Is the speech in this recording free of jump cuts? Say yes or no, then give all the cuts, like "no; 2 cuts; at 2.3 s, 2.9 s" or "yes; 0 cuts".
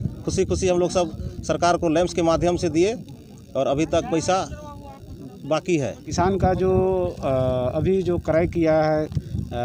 no; 1 cut; at 6.1 s